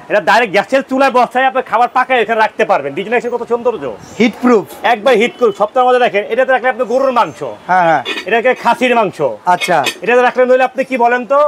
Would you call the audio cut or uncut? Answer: uncut